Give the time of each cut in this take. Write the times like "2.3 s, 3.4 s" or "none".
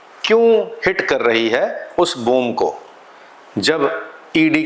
none